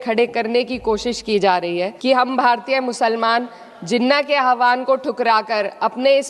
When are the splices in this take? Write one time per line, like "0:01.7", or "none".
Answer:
0:01.9